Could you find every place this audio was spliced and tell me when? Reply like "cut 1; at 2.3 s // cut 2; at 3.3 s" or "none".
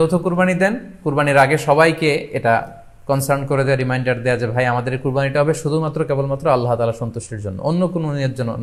none